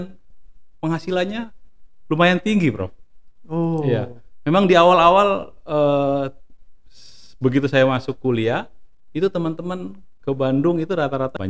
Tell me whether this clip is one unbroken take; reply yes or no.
yes